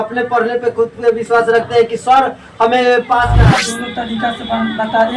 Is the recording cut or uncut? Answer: cut